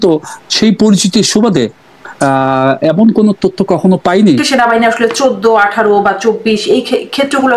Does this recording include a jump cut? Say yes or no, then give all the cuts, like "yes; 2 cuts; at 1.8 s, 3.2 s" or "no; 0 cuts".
yes; 1 cut; at 4.4 s